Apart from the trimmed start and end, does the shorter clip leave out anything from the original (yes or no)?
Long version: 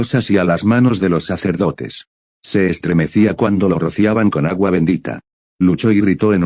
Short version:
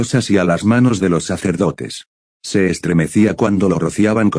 no